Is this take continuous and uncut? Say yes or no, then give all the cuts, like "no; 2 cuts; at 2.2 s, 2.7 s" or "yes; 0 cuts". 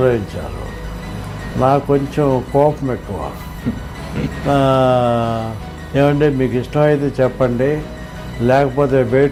yes; 0 cuts